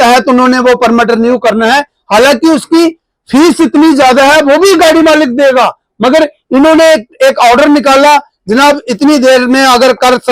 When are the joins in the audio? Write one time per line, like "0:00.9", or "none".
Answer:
none

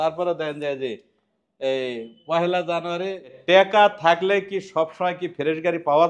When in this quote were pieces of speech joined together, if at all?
0:03.4

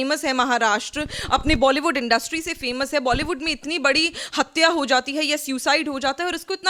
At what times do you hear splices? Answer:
none

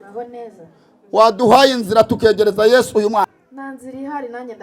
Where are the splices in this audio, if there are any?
0:03.3

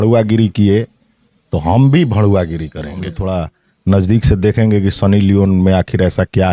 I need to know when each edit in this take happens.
0:03.2

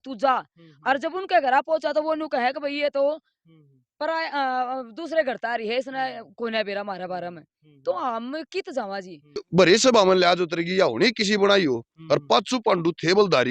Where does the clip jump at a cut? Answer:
0:09.4

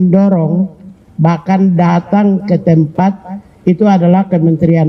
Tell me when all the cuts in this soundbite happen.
none

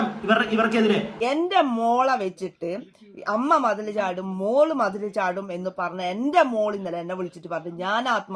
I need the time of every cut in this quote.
0:01.1

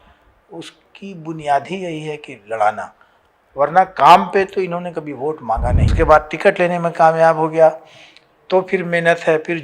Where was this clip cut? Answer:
0:05.9

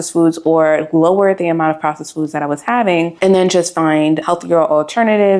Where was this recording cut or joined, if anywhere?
0:03.1
0:04.2

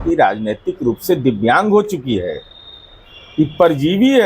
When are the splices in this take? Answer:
none

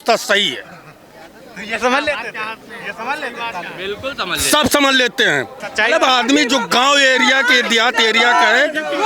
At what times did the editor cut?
0:05.6

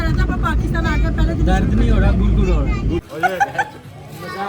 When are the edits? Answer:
0:03.0

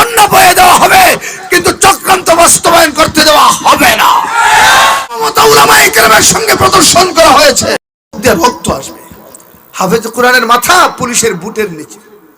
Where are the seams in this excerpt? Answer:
0:05.1

